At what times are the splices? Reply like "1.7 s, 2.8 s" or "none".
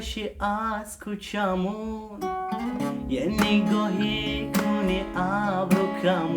none